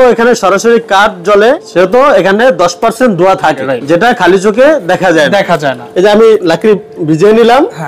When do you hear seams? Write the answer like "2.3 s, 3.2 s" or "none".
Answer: 1.6 s, 3.7 s, 5.8 s

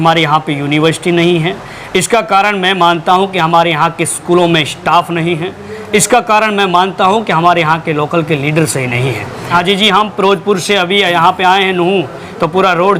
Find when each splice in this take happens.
9.5 s

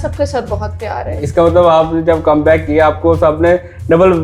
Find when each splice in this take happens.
none

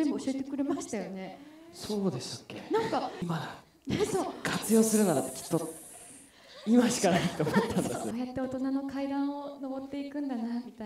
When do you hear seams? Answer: 3.2 s, 8.1 s

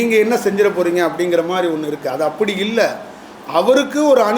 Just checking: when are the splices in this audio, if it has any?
none

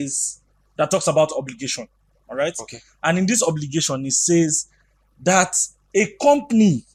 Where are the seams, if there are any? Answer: none

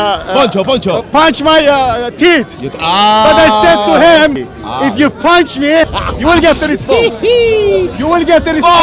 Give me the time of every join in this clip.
4.4 s, 6.0 s

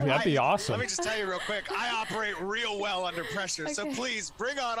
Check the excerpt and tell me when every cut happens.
none

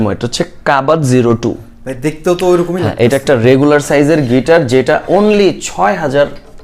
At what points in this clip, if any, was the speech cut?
none

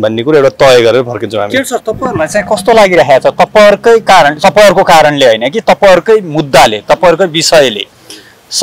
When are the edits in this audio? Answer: none

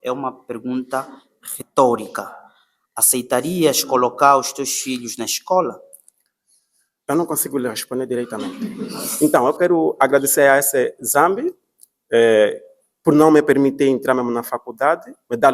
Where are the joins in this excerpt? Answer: 9.0 s

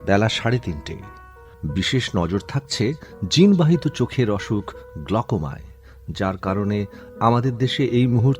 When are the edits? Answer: 1.3 s

